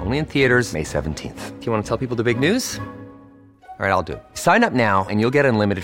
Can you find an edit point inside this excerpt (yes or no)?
no